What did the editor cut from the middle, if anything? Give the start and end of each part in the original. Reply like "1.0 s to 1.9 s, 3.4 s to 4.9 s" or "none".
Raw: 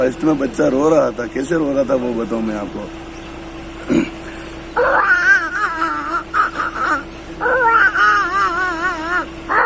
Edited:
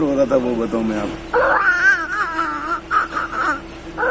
2.7 s to 4.6 s